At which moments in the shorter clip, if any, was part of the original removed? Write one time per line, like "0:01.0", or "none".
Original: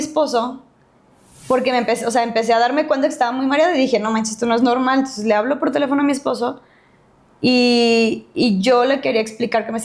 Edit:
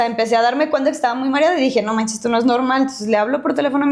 none